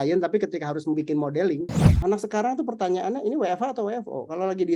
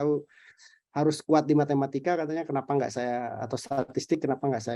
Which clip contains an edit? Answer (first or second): first